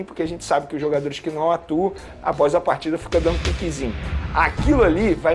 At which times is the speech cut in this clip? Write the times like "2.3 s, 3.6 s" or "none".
none